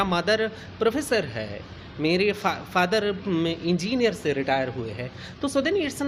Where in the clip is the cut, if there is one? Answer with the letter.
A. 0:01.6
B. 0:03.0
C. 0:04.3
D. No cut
D